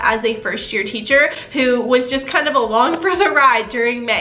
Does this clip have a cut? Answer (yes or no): no